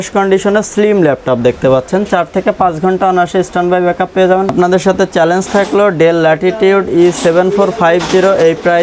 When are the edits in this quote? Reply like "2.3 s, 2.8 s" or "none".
4.5 s